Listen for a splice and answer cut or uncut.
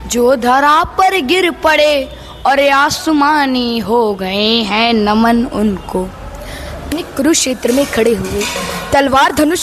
cut